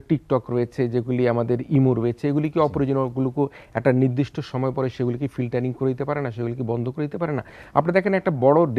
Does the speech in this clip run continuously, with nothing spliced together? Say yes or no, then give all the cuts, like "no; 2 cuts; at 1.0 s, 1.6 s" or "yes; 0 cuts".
no; 1 cut; at 7.6 s